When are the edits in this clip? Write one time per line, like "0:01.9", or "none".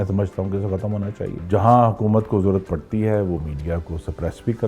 0:01.4